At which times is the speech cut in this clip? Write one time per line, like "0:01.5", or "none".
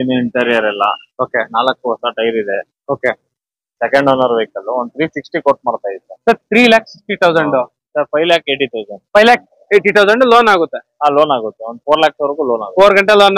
0:07.8